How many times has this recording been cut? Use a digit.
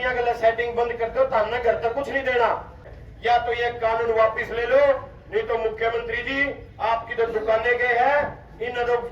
1